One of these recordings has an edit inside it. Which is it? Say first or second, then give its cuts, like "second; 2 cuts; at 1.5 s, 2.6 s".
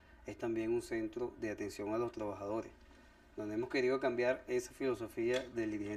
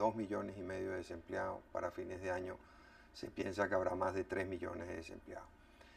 second; 1 cut; at 1.0 s